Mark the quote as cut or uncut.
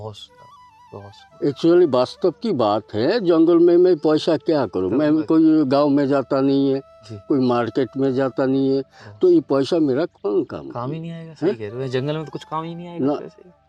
uncut